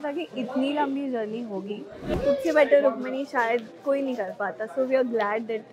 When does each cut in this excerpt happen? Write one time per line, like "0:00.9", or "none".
0:02.1